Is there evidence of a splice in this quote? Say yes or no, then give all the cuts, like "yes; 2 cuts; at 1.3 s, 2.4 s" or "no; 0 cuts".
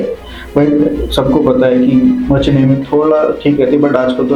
no; 0 cuts